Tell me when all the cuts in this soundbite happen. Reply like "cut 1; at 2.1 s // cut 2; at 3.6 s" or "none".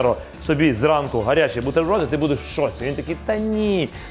none